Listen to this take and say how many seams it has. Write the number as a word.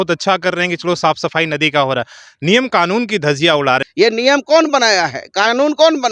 one